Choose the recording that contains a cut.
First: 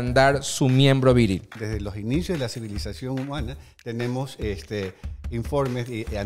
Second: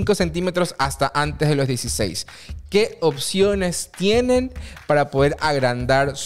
first; 1 cut; at 1.5 s

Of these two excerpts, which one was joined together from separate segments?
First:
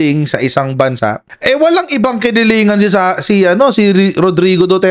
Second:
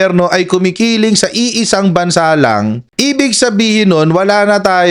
second; 1 cut; at 2.9 s

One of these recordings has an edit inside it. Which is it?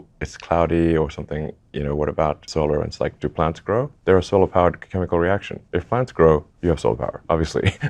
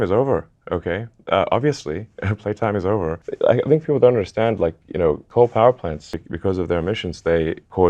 second; 2 cuts; at 3.2 s, 6.1 s

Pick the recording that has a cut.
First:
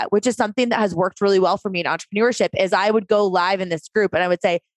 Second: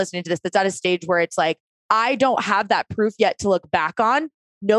second; 1 cut; at 1.7 s

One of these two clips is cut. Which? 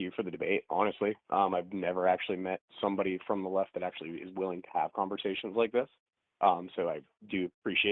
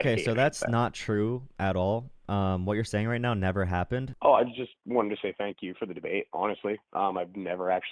second; 1 cut; at 4.1 s

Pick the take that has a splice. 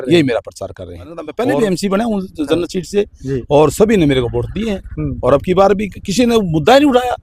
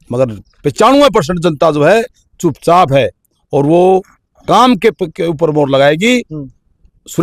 first; 1 cut; at 1.3 s

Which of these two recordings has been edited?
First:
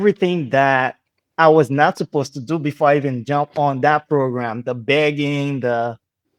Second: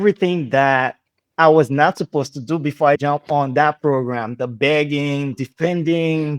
second; 2 cuts; at 3.0 s, 5.3 s

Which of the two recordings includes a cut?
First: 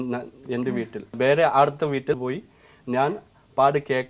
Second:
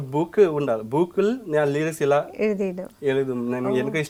first; 2 cuts; at 1.1 s, 2.2 s

